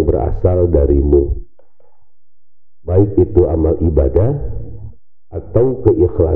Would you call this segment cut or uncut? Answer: uncut